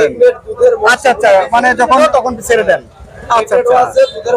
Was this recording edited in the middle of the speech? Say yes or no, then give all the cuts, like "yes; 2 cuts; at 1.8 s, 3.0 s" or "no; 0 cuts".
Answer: yes; 1 cut; at 2.0 s